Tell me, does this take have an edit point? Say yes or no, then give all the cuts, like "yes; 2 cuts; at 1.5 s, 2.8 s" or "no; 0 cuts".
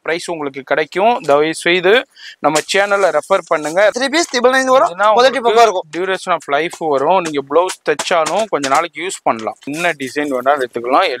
yes; 2 cuts; at 4.0 s, 9.7 s